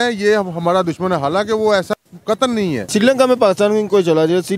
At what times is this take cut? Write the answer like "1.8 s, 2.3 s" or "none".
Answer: 2.9 s